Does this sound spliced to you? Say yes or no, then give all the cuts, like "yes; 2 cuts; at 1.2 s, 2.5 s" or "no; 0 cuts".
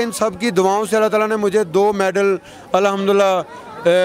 no; 0 cuts